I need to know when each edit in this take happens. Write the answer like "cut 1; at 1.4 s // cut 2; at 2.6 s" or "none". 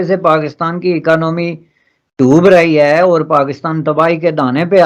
none